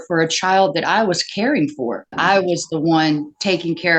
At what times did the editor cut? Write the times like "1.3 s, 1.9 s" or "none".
2.2 s